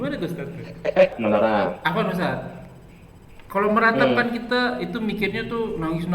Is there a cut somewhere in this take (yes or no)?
yes